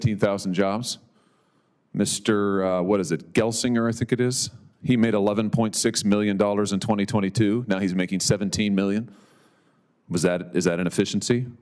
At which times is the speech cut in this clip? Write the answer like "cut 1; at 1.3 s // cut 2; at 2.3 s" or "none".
none